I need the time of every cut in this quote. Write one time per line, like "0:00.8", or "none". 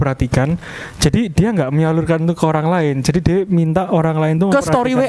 none